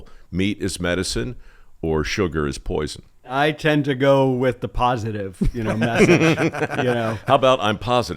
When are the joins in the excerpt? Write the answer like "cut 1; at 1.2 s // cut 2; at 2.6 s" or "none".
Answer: cut 1; at 3.3 s